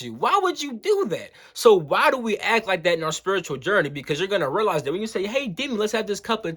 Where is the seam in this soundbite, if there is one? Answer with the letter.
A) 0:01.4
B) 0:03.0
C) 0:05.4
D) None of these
D